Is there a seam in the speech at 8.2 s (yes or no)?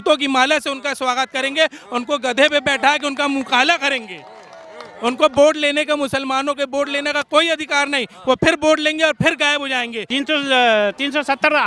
no